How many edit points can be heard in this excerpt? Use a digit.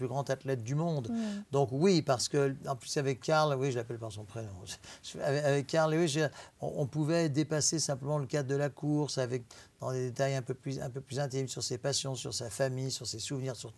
0